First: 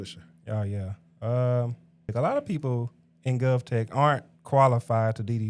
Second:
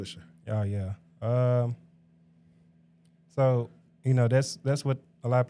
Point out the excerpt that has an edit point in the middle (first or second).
first